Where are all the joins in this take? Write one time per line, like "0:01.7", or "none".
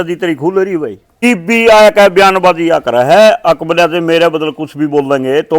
0:01.2